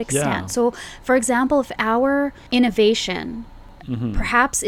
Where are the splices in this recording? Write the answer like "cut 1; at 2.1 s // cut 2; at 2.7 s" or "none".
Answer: cut 1; at 2.4 s // cut 2; at 3.8 s